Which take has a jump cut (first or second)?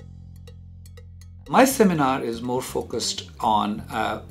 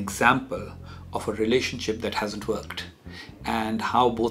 first